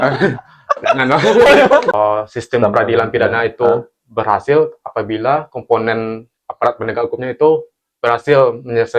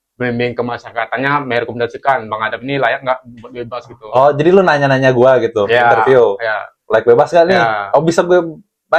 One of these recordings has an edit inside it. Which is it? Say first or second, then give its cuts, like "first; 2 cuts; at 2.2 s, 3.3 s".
first; 1 cut; at 1.9 s